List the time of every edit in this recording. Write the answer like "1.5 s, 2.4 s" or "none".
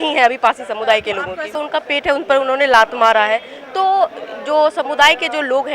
1.4 s